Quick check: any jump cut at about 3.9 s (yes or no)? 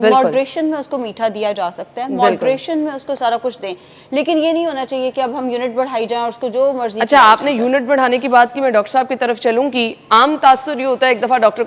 no